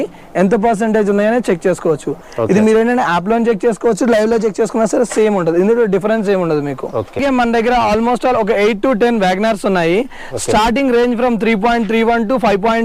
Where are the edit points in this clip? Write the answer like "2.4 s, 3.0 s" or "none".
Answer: 7.2 s